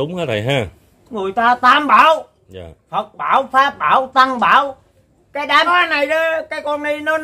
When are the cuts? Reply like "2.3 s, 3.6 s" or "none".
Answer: 5.9 s

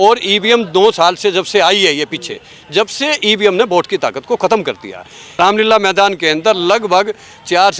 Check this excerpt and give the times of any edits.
5.2 s

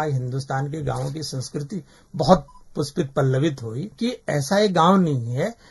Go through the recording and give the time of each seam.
3.9 s

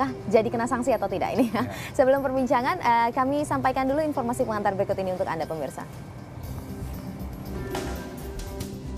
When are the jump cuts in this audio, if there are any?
none

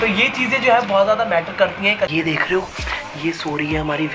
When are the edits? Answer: 2.1 s

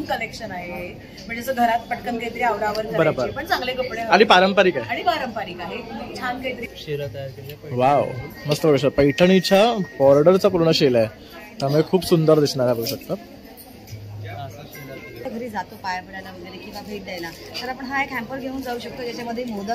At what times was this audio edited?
6.6 s, 15.3 s

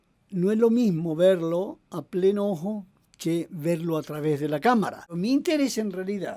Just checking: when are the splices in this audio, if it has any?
5.1 s

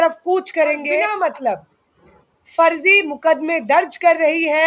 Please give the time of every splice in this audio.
1.1 s

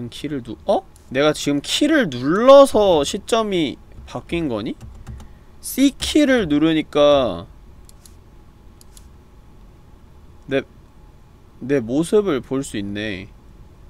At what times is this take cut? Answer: 1.0 s

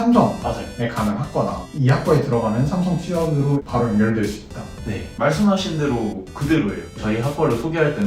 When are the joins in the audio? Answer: 5.1 s, 7.0 s

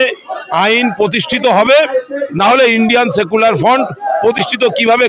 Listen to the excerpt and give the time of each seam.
none

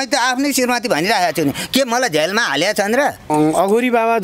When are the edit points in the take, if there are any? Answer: 3.3 s

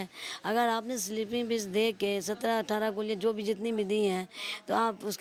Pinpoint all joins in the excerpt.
none

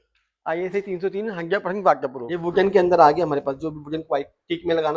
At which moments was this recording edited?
2.3 s

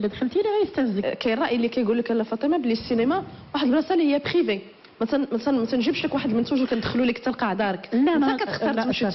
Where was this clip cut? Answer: 1.7 s

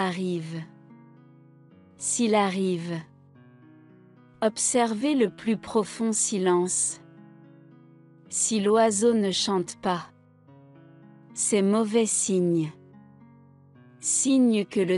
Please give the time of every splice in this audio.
none

